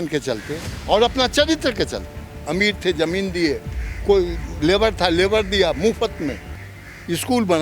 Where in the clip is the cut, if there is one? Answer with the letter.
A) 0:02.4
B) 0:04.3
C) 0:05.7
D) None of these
A